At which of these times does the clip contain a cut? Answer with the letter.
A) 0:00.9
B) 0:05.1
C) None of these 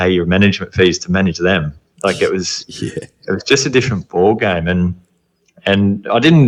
C